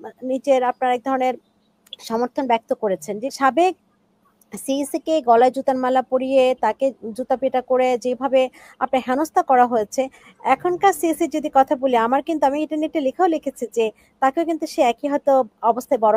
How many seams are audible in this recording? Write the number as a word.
one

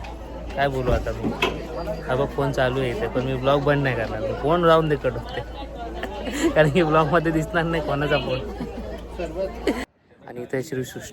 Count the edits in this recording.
one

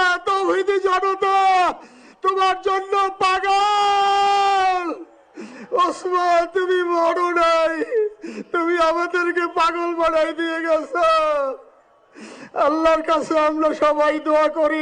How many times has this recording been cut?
zero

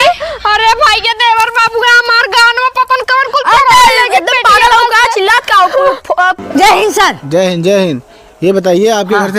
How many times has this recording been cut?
one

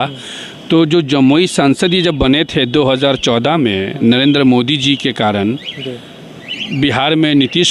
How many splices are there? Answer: zero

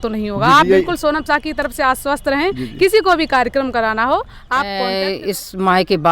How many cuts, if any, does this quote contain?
one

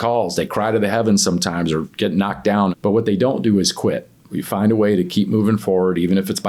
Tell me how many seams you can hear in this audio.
two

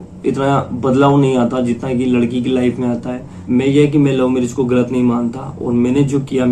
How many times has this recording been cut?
one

